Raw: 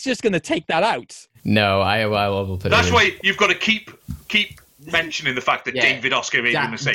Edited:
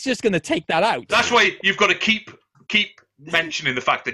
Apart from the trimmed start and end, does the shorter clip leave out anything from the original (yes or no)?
yes